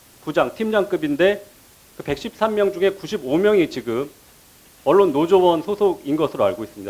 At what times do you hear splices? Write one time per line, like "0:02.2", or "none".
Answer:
none